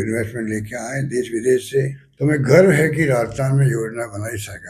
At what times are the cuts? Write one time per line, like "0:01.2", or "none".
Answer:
0:02.0